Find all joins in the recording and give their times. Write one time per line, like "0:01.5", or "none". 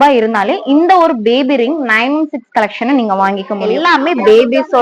0:03.7